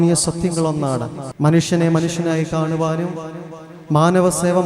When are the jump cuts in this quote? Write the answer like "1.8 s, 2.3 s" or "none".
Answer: 1.2 s